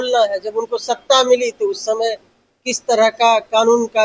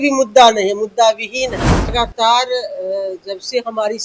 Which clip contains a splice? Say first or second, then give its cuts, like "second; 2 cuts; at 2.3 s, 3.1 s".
second; 1 cut; at 1.9 s